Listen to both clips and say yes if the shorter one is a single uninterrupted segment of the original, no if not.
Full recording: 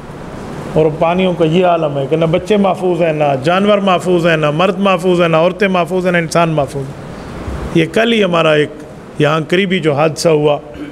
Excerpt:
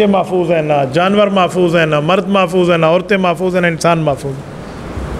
yes